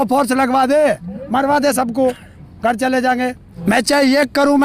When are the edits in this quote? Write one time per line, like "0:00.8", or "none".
0:03.5